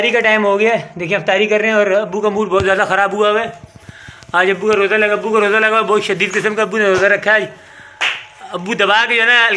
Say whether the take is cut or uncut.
uncut